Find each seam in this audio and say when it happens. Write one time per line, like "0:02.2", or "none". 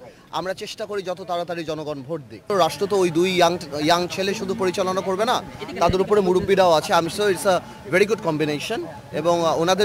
0:02.5